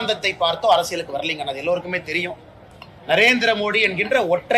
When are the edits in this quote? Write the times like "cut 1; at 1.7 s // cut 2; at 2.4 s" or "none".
none